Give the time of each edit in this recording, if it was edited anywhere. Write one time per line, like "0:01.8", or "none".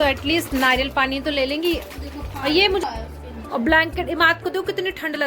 0:02.8